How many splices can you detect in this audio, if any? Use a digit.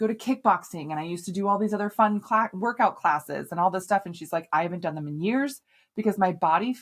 0